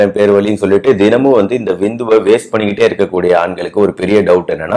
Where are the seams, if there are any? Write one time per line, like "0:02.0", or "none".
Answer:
none

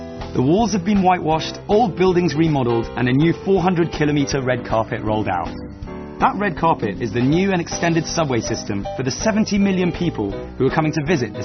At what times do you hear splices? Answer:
0:07.8

